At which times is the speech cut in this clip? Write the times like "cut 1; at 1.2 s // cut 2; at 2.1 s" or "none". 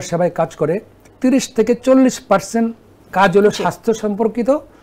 cut 1; at 1.0 s